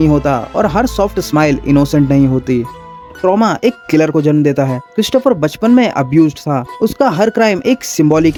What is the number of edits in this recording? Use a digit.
0